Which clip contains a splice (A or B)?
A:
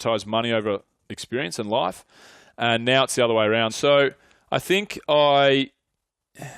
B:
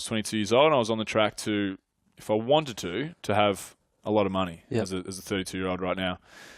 A